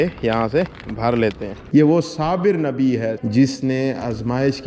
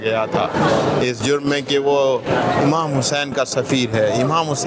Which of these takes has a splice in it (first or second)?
first